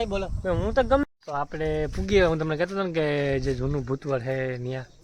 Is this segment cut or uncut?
cut